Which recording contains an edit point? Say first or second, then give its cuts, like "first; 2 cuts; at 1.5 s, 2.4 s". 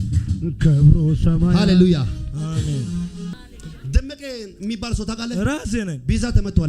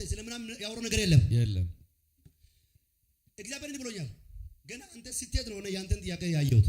first; 1 cut; at 3.3 s